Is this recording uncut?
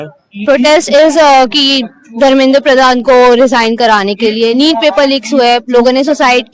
yes; 0 cuts

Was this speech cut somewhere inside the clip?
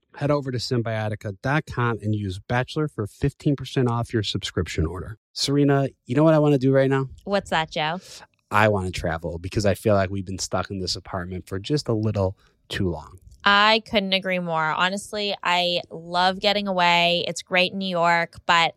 yes; 1 cut; at 5.1 s

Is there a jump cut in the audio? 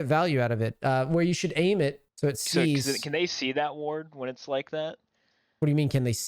yes; 1 cut; at 2.0 s

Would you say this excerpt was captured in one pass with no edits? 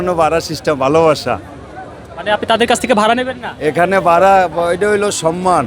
yes; 0 cuts

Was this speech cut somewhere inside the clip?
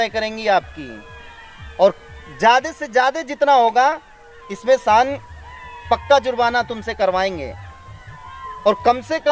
no; 0 cuts

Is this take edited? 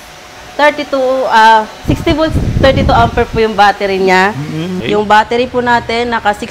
yes; 1 cut; at 4.6 s

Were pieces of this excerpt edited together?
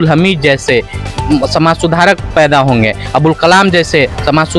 no; 0 cuts

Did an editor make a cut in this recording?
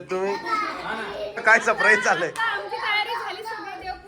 yes; 1 cut; at 1.4 s

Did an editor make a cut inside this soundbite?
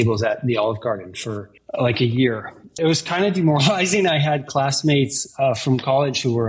yes; 1 cut; at 2.8 s

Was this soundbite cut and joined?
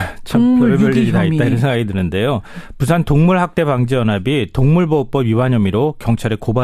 yes; 1 cut; at 3.2 s

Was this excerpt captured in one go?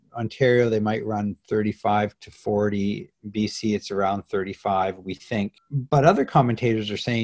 no; 1 cut; at 5.7 s

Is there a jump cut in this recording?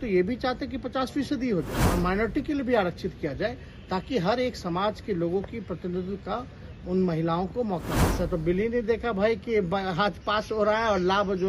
yes; 2 cuts; at 1.8 s, 8.0 s

